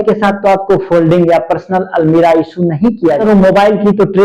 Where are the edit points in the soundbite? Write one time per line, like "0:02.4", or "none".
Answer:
0:03.2